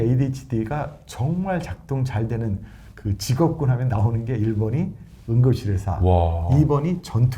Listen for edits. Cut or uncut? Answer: uncut